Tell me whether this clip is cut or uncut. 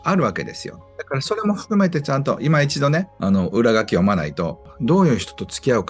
cut